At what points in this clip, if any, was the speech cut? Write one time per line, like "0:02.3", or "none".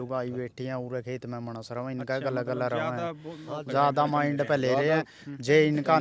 none